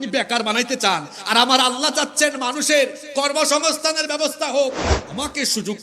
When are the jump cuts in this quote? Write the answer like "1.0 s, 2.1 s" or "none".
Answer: 4.9 s